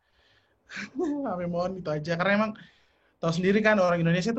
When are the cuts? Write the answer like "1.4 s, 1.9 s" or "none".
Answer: none

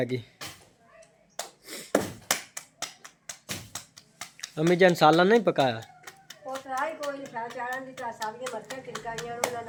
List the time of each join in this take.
none

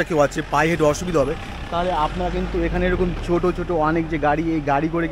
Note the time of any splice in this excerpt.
none

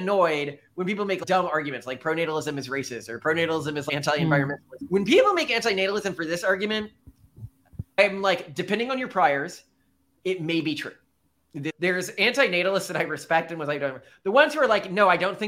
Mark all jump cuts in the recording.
1.2 s, 3.9 s, 4.7 s, 8.0 s, 11.7 s

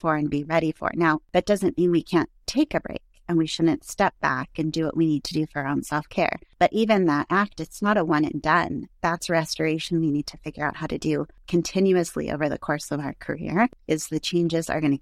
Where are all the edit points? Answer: 1.2 s, 6.4 s, 11.4 s, 13.8 s

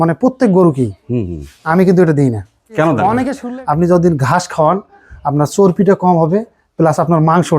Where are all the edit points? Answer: 3.4 s

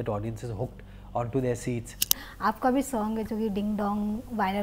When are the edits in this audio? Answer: 2.3 s

